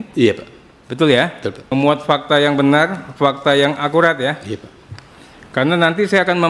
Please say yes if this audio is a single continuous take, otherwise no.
no